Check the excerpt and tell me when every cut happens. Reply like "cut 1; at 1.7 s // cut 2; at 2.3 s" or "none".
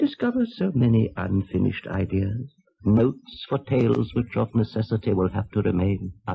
cut 1; at 1.1 s